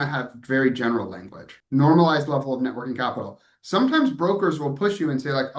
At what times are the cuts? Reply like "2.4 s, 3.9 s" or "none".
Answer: 1.5 s